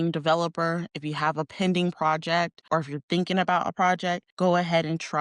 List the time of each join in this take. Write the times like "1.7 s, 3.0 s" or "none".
2.6 s, 4.3 s